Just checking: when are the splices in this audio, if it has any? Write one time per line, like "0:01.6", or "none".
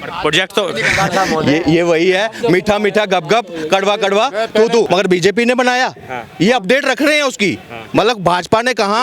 0:04.9